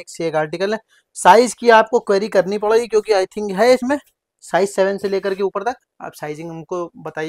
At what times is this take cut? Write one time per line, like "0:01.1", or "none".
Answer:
none